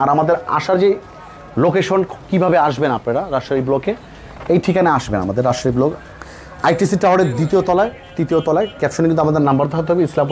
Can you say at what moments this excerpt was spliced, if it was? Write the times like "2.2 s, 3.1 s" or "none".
none